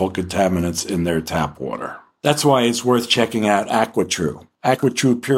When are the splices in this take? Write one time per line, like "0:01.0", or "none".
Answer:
none